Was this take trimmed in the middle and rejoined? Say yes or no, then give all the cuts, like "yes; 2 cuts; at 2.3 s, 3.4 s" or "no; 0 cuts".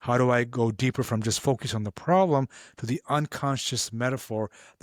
no; 0 cuts